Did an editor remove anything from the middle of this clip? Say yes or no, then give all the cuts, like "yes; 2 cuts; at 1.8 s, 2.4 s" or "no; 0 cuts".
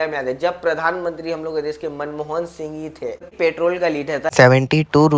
yes; 1 cut; at 3.2 s